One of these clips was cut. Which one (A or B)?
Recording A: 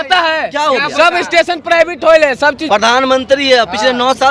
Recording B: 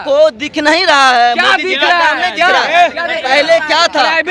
A